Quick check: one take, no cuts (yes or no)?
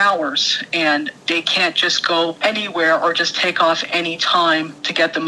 yes